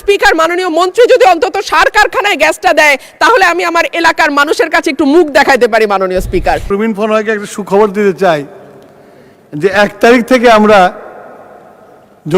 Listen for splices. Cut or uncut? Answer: cut